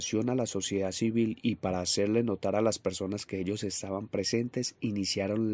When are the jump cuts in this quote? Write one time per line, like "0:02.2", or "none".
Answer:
none

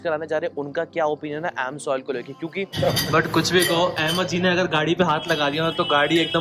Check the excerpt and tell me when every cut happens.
0:02.7

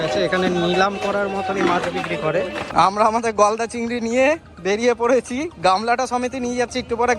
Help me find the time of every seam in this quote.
0:02.6
0:04.5

